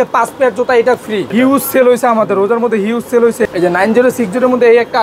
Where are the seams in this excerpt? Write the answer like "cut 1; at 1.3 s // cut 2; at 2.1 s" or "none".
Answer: cut 1; at 1.3 s // cut 2; at 3.4 s